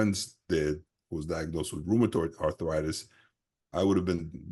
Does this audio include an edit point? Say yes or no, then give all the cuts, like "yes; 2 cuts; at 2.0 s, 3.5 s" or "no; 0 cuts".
no; 0 cuts